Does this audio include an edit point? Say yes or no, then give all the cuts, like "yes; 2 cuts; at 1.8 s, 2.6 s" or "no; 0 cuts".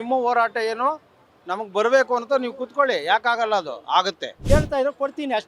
yes; 1 cut; at 4.4 s